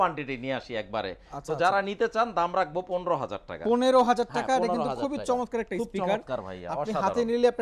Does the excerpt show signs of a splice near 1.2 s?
no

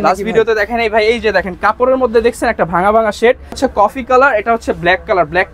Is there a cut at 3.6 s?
yes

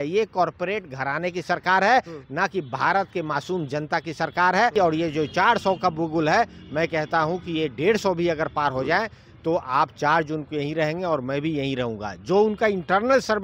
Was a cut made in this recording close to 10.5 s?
no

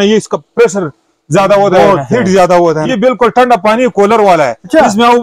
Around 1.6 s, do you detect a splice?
no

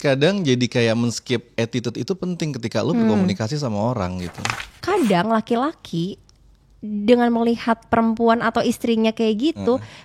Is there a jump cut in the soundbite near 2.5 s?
no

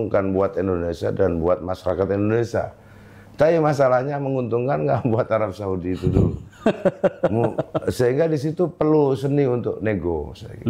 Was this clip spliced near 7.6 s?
no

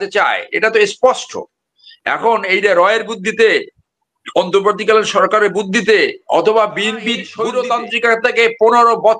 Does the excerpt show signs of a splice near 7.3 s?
yes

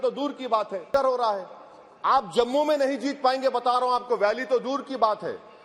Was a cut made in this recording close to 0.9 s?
yes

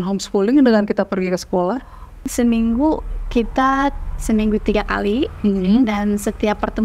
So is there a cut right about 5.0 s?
no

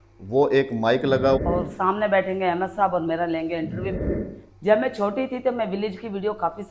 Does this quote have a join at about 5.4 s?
no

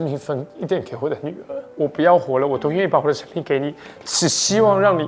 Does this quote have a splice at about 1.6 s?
yes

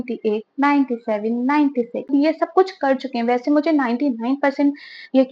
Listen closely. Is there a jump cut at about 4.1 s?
no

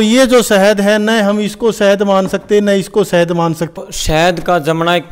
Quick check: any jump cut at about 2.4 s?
no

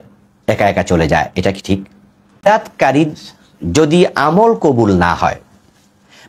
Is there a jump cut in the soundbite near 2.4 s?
yes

